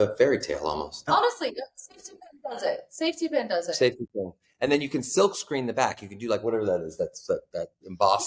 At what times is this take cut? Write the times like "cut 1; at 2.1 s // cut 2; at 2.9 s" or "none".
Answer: cut 1; at 1.0 s